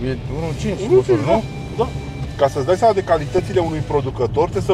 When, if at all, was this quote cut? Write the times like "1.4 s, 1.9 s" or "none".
2.3 s